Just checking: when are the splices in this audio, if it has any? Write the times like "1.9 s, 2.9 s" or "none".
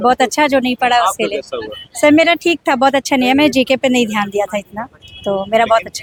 none